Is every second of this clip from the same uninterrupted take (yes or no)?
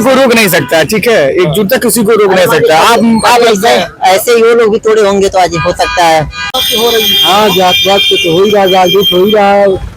no